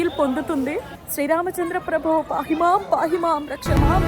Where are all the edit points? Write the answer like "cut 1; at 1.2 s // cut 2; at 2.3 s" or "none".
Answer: cut 1; at 1.0 s